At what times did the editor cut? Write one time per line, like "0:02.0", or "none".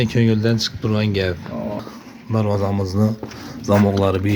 0:02.0